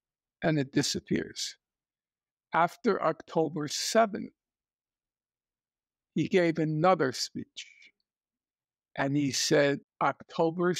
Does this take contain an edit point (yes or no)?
yes